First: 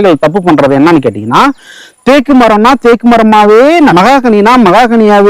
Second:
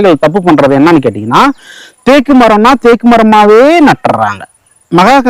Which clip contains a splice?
first; 1 cut; at 3.9 s

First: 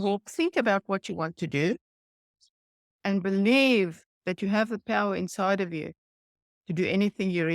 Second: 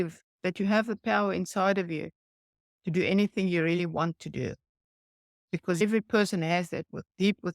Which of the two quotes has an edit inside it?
second; 1 cut; at 5.8 s

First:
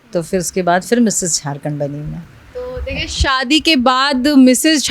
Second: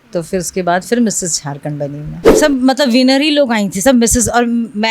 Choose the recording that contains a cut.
second; 1 cut; at 2.2 s

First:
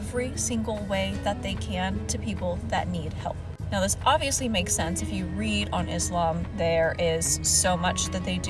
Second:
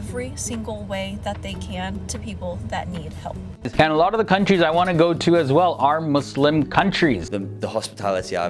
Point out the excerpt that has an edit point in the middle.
second; 2 cuts; at 3.7 s, 7.3 s

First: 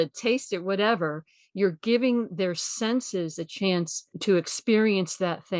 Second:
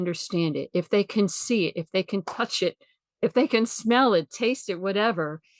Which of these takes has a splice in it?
first; 1 cut; at 4.2 s

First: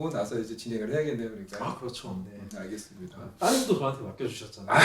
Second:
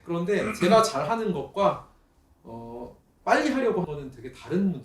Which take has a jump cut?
second; 1 cut; at 3.8 s

